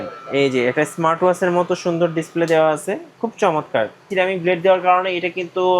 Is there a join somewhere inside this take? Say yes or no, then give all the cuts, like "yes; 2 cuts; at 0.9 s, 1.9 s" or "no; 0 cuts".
yes; 1 cut; at 4.1 s